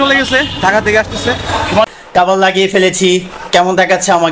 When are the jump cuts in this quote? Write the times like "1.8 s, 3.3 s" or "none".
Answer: 2.0 s